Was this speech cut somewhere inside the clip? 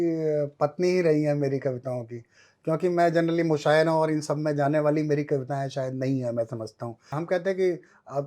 yes; 1 cut; at 7.2 s

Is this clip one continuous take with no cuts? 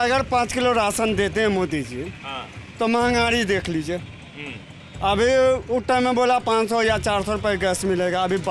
yes; 0 cuts

